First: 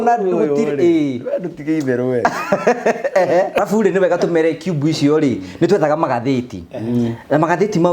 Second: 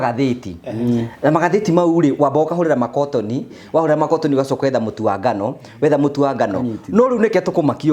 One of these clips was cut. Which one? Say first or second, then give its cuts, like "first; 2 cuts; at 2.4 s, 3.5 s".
first; 1 cut; at 3.6 s